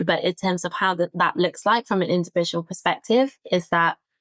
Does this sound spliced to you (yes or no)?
no